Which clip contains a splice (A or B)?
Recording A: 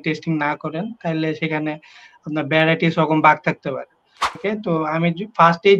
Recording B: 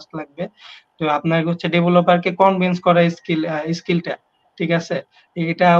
A